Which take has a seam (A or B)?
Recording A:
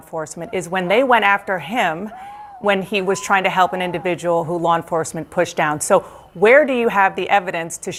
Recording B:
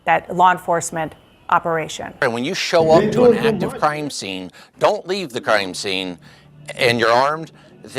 B